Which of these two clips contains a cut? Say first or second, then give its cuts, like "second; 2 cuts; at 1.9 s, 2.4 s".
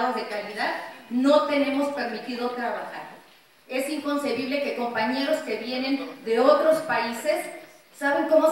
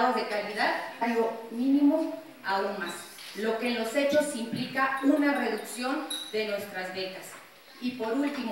first; 1 cut; at 1.0 s